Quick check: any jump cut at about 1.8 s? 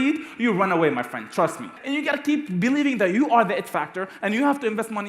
yes; 1 cut; at 1.8 s

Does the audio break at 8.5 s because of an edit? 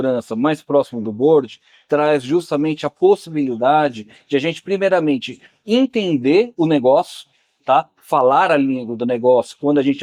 no; 0 cuts

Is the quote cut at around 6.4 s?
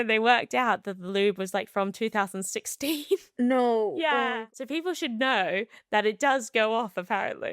no; 1 cut; at 4.3 s

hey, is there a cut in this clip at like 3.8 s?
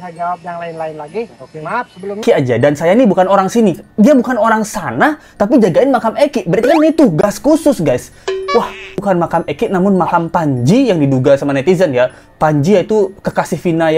no; 2 cuts; at 2.2 s, 9.0 s

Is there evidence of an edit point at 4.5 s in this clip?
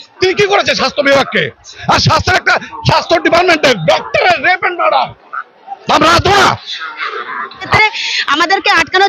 no; 1 cut; at 7.7 s

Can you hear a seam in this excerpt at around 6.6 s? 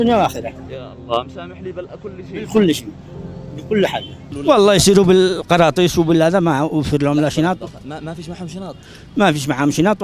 no; 1 cut; at 4.3 s

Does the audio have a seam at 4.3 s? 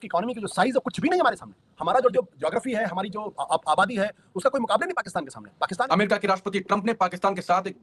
no; 2 cuts; at 2.1 s, 5.9 s

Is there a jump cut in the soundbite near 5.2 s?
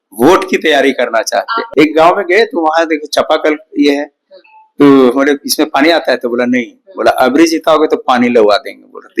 no; 1 cut; at 1.6 s

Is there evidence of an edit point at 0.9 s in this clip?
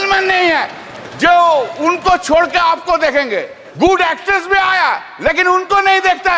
no; 1 cut; at 3.6 s

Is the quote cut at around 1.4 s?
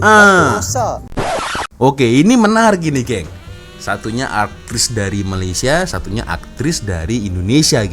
yes; 1 cut; at 1.4 s

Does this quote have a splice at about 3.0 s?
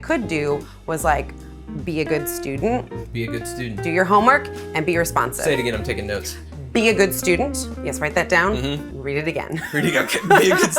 yes; 1 cut; at 3.0 s

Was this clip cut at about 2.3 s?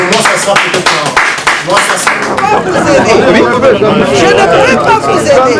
yes; 1 cut; at 2.3 s

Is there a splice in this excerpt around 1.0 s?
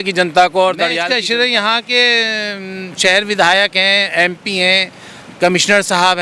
yes; 1 cut; at 1.0 s

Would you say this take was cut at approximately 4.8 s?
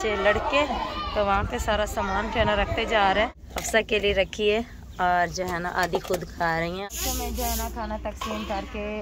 no; 2 cuts; at 3.4 s, 6.8 s

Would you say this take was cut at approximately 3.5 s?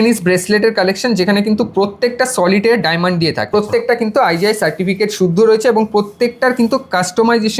yes; 1 cut; at 3.5 s

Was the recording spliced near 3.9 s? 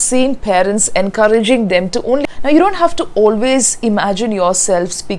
no; 1 cut; at 2.2 s

